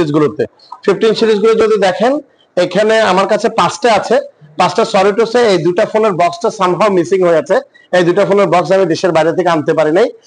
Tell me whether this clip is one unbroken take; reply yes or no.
yes